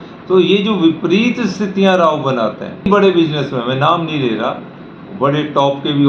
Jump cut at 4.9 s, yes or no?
no